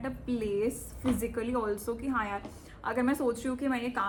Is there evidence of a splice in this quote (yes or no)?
no